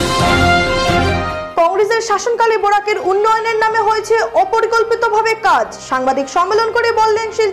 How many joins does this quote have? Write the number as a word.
one